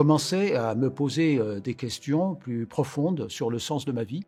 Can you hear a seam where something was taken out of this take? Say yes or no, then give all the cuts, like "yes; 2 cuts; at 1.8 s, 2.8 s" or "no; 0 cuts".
no; 0 cuts